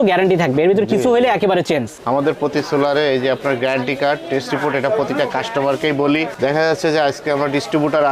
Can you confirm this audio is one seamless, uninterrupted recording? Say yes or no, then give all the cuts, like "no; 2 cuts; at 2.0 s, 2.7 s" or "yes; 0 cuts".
yes; 0 cuts